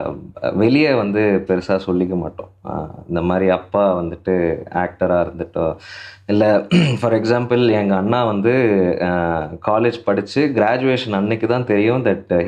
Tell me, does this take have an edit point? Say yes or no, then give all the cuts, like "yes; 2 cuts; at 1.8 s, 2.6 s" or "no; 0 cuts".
no; 0 cuts